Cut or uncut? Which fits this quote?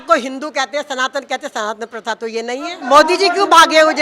cut